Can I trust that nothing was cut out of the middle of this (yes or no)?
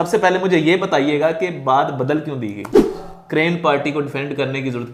no